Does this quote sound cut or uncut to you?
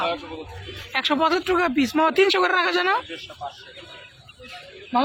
uncut